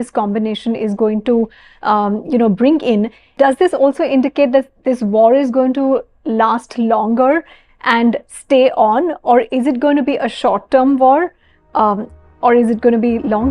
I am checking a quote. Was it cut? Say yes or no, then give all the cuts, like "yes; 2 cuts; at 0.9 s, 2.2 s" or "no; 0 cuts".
no; 0 cuts